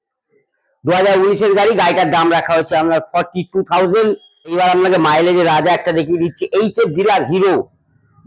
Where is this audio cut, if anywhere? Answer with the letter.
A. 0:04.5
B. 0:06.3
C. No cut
A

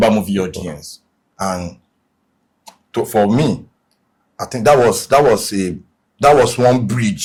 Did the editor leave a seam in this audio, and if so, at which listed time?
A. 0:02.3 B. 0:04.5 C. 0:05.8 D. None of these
D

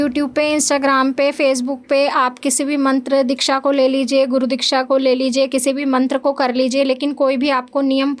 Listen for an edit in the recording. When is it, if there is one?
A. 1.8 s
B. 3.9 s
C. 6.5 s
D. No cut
D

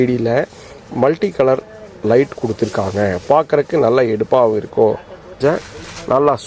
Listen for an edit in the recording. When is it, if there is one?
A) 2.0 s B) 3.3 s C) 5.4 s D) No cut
C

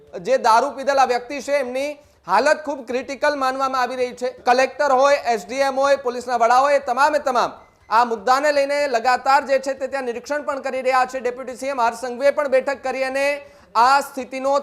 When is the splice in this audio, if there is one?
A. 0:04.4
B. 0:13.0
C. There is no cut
A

